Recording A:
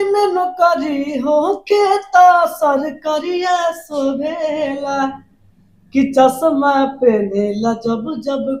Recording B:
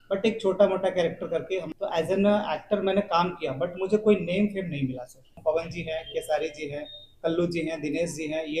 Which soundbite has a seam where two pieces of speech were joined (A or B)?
B